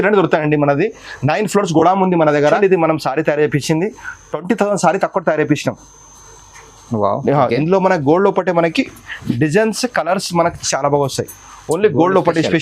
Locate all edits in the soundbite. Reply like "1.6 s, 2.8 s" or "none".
2.6 s